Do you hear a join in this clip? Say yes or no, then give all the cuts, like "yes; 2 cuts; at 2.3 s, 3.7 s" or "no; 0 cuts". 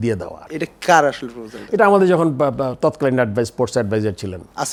no; 0 cuts